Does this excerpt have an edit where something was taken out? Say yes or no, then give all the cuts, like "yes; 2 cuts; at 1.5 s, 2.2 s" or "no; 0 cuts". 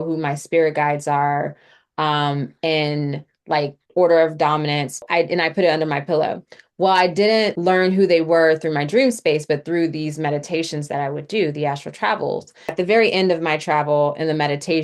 yes; 3 cuts; at 5.0 s, 7.6 s, 12.7 s